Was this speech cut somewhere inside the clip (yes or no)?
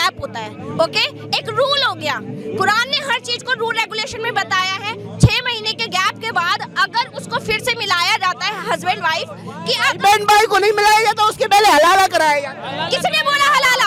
no